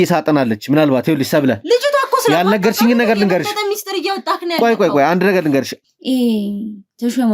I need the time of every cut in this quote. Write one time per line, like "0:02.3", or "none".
0:05.8